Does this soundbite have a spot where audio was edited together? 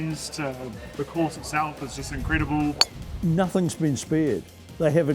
yes; 1 cut; at 3.0 s

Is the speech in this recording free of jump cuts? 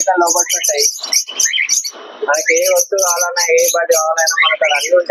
yes; 0 cuts

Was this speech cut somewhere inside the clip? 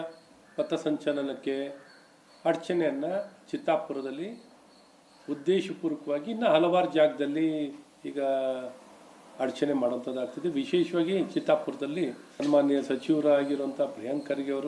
yes; 1 cut; at 3.1 s

